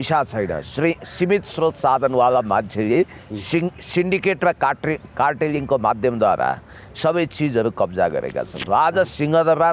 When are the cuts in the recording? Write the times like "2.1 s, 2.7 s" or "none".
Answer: 8.6 s